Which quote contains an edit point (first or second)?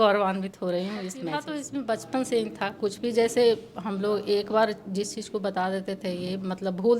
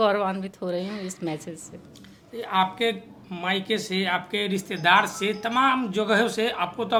first